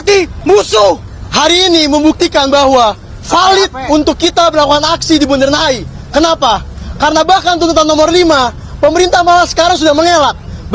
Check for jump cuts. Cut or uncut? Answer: uncut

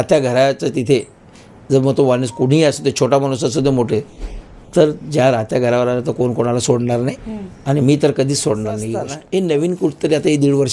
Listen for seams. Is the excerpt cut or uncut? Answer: cut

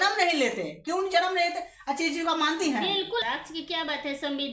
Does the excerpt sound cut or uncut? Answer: cut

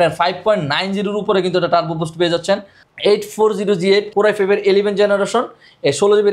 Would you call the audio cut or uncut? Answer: cut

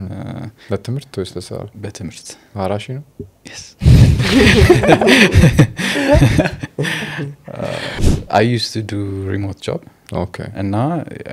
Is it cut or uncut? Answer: cut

